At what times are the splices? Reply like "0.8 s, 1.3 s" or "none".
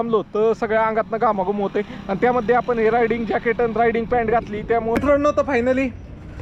5.0 s